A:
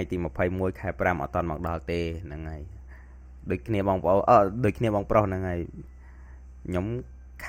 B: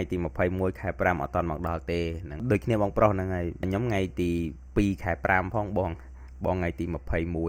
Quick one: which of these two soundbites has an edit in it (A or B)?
B